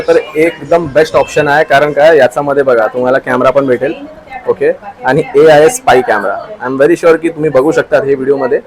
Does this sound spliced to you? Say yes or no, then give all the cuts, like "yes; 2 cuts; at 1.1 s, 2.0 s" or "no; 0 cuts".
no; 0 cuts